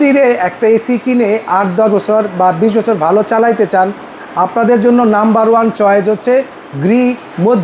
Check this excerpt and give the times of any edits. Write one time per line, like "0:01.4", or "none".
none